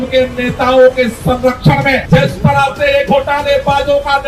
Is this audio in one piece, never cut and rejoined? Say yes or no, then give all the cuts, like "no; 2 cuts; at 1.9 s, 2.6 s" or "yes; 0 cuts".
yes; 0 cuts